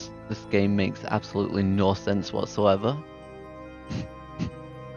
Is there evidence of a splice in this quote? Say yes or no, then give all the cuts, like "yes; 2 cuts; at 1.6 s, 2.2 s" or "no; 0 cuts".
no; 0 cuts